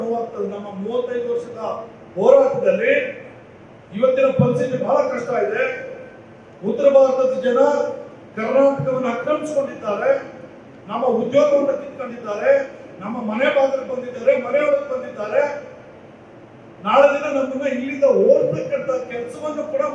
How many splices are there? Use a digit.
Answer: 0